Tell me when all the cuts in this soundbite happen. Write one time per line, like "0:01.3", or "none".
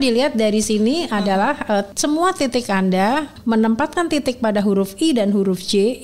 0:01.9
0:03.3